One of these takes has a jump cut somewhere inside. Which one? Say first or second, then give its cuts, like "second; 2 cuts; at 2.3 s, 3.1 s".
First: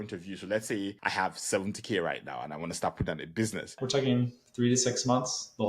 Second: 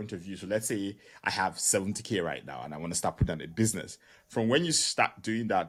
first; 2 cuts; at 1.0 s, 3.8 s